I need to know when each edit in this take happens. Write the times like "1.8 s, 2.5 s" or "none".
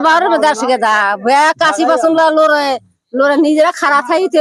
none